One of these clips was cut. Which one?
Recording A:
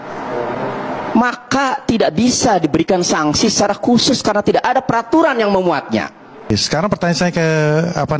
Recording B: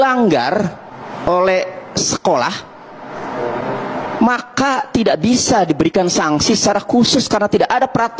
A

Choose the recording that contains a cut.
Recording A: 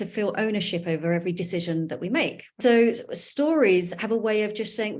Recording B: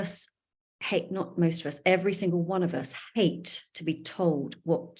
A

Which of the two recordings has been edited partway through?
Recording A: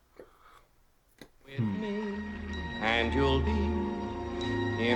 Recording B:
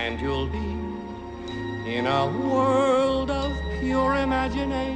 A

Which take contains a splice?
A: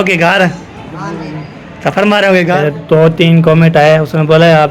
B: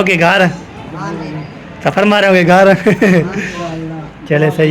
A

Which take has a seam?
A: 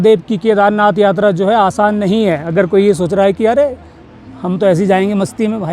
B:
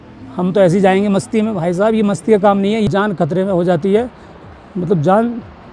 B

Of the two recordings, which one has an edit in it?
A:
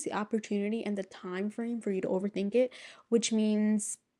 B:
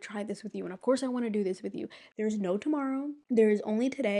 B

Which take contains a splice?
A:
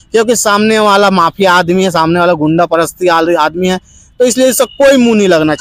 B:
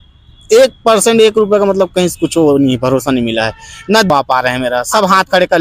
B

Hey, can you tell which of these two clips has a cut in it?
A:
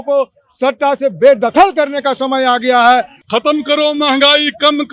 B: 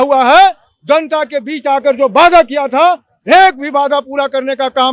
A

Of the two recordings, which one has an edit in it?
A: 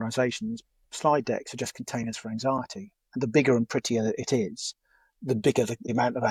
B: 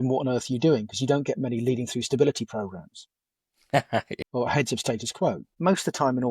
B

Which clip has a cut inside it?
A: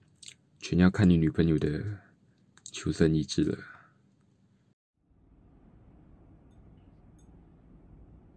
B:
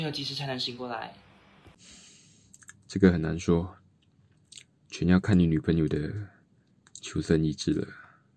B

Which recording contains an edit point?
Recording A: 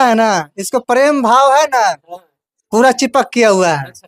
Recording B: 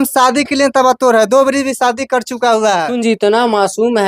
B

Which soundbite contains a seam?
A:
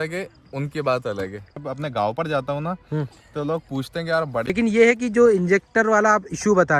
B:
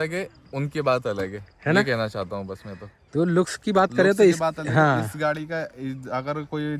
A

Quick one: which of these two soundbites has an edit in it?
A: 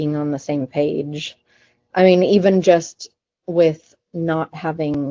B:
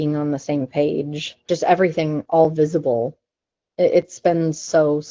B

